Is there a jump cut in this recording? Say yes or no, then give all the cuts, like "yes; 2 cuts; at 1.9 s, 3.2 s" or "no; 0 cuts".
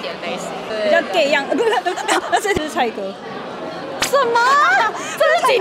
yes; 1 cut; at 2.6 s